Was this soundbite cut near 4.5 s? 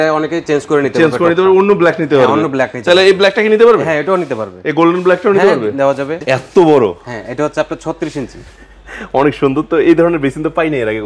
no; 1 cut; at 6.2 s

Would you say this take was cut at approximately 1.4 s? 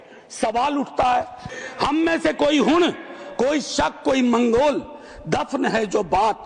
yes; 1 cut; at 1.4 s

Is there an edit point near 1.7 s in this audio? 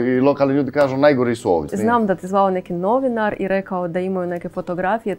yes; 1 cut; at 1.7 s

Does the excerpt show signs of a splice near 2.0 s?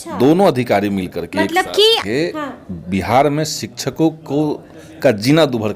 yes; 1 cut; at 2.0 s

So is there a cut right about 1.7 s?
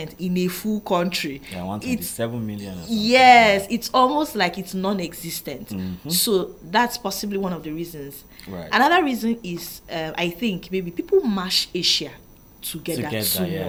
no; 0 cuts

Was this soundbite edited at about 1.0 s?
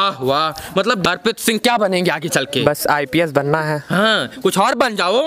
yes; 1 cut; at 1.0 s

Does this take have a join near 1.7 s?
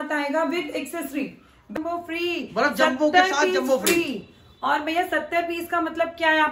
yes; 1 cut; at 1.7 s

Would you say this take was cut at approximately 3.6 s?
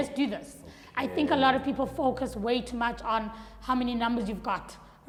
no; 0 cuts

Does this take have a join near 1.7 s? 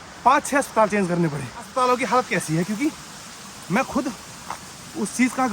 yes; 1 cut; at 1.7 s

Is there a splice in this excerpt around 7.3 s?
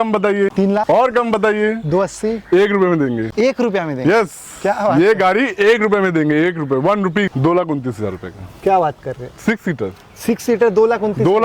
yes; 1 cut; at 7.3 s

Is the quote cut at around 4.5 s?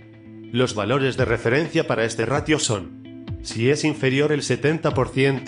yes; 1 cut; at 4.5 s

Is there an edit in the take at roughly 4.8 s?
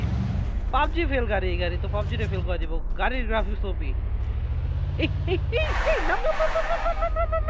no; 0 cuts

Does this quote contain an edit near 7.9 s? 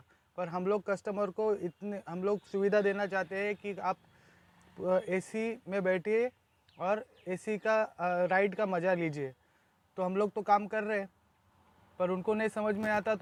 no; 0 cuts

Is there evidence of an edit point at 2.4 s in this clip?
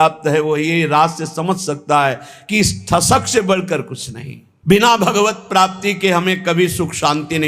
no; 1 cut; at 4.5 s

